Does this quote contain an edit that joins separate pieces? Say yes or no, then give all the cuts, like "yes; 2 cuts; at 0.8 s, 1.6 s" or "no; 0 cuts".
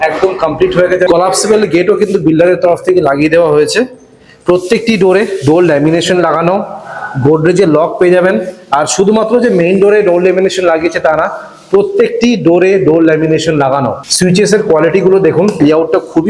yes; 3 cuts; at 1.1 s, 14.0 s, 15.6 s